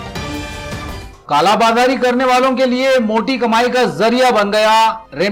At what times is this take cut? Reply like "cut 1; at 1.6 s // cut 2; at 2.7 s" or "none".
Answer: none